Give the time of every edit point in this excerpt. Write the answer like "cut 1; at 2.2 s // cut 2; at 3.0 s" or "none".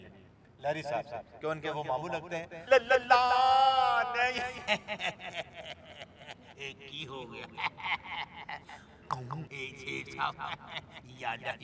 cut 1; at 2.6 s // cut 2; at 9.5 s